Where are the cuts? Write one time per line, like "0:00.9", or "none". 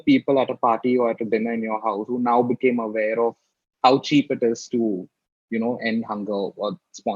none